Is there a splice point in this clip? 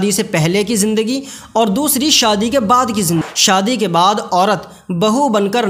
yes; 1 cut; at 3.3 s

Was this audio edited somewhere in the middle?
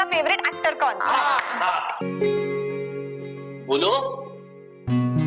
yes; 1 cut; at 2.0 s

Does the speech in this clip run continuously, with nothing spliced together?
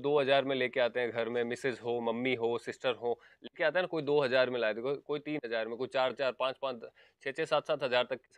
yes; 0 cuts

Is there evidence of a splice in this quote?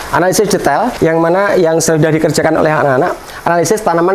yes; 1 cut; at 0.9 s

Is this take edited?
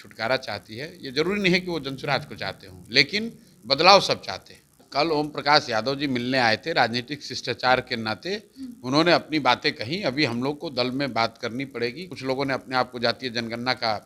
yes; 2 cuts; at 4.8 s, 12.0 s

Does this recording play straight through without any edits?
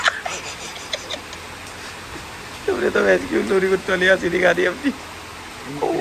yes; 0 cuts

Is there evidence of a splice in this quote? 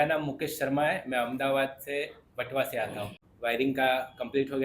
yes; 1 cut; at 3.2 s

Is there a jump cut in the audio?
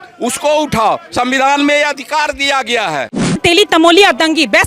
yes; 1 cut; at 3.4 s

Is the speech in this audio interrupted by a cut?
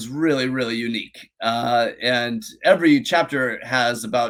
no; 0 cuts

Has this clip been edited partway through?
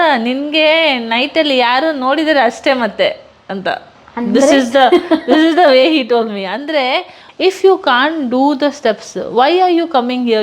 yes; 1 cut; at 7.2 s

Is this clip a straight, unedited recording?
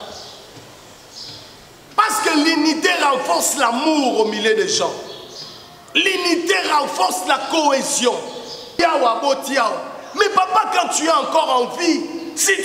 no; 1 cut; at 8.8 s

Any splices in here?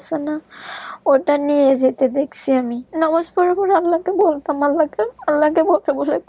yes; 1 cut; at 2.8 s

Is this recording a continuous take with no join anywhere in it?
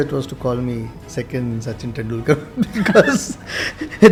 yes; 0 cuts

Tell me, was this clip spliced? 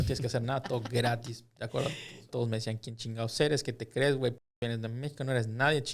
yes; 1 cut; at 2.3 s

